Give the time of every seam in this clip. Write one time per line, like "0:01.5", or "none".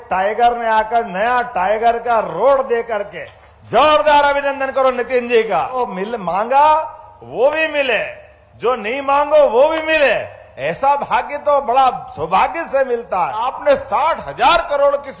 0:05.7
0:13.3